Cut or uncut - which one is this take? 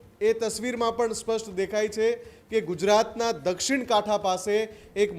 uncut